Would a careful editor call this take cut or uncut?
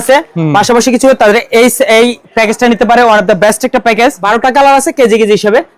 cut